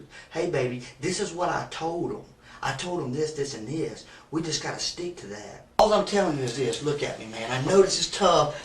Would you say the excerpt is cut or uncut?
cut